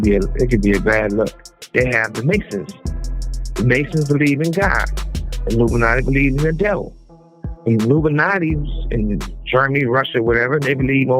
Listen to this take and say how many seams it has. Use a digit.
1